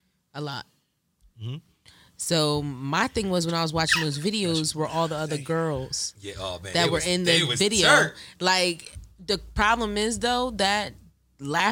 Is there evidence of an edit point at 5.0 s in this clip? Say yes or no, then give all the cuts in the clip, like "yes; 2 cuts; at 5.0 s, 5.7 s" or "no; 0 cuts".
no; 0 cuts